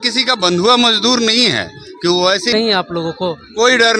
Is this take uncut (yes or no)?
no